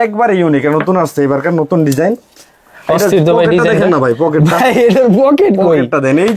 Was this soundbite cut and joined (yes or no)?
no